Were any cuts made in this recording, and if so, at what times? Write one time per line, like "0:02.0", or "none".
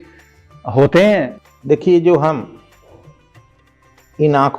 0:01.4